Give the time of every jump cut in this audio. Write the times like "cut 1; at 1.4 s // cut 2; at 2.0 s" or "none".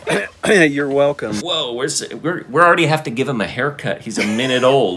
cut 1; at 1.4 s